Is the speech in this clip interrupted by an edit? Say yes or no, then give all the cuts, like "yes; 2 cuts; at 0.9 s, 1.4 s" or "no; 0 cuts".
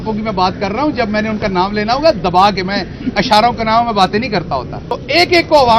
yes; 1 cut; at 4.8 s